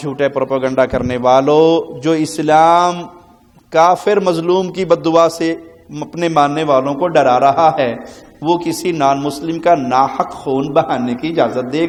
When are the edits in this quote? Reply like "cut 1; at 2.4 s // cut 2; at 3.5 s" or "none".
none